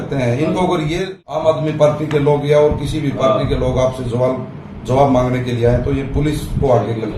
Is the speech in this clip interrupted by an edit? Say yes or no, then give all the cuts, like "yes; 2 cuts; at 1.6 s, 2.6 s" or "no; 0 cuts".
yes; 1 cut; at 1.1 s